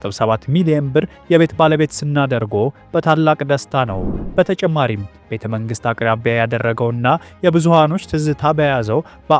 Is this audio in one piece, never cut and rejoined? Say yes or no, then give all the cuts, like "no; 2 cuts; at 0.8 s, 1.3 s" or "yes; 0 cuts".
yes; 0 cuts